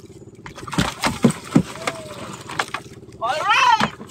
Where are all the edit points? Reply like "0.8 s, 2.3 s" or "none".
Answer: none